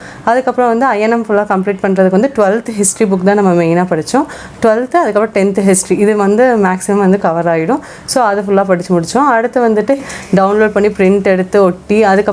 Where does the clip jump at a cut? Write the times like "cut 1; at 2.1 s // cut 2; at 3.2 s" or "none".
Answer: cut 1; at 10.0 s